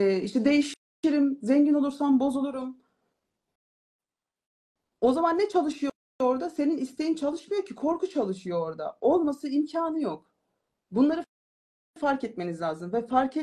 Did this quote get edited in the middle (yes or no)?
no